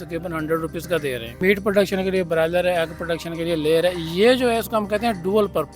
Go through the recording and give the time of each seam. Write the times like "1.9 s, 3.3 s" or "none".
1.4 s